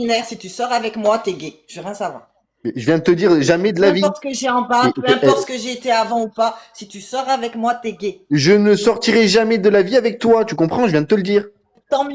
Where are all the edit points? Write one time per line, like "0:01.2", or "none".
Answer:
none